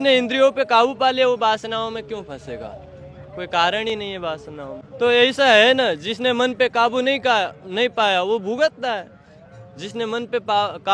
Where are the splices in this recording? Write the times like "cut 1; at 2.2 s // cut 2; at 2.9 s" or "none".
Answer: cut 1; at 4.8 s